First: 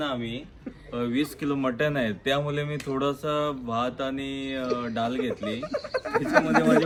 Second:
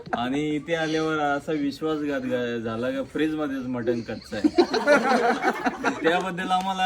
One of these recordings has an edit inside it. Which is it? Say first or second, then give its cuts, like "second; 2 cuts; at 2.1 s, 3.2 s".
second; 1 cut; at 5.0 s